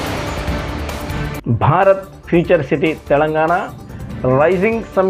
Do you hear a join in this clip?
yes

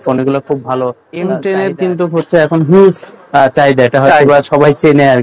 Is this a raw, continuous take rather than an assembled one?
no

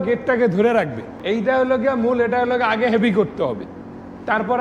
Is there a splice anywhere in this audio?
yes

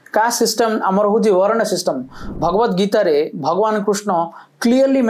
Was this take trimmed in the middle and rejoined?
yes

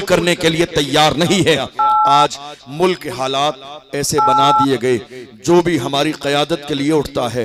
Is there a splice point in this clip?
yes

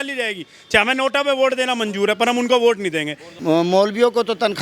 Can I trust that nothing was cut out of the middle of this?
no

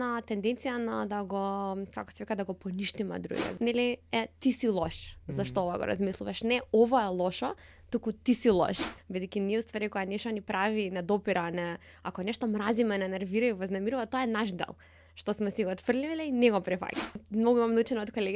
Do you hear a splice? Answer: yes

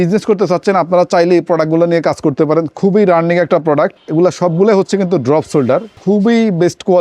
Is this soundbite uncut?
no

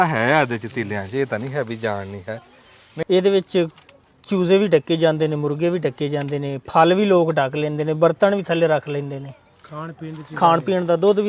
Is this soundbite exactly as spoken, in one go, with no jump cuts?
no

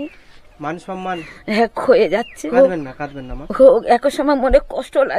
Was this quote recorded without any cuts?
no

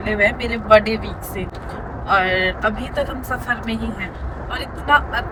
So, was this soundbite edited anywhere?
no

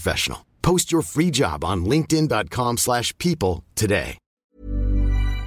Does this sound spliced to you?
yes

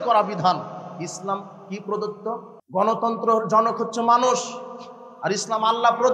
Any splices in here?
yes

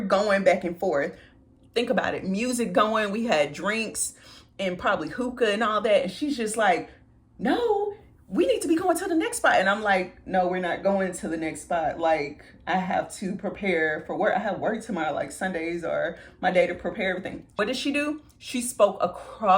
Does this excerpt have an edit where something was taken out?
yes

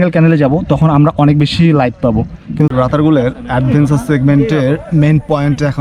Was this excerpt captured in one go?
no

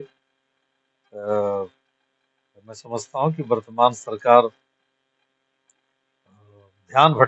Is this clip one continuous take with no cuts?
yes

